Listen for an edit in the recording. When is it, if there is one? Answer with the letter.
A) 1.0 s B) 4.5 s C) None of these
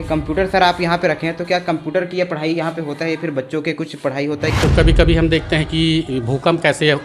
B